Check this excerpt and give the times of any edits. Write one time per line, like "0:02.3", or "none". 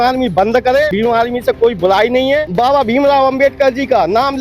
0:00.9
0:02.5